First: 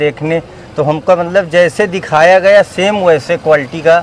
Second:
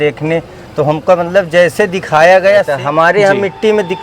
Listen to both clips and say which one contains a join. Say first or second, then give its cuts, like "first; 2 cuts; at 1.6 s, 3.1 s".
second; 1 cut; at 2.7 s